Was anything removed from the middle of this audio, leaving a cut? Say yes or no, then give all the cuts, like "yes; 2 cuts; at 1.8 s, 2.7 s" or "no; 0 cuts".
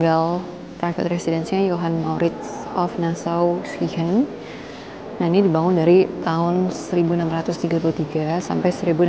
no; 0 cuts